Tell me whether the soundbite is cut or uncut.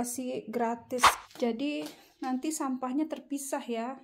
cut